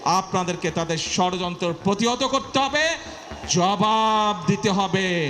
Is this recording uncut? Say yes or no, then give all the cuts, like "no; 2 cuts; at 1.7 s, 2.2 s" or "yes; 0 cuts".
yes; 0 cuts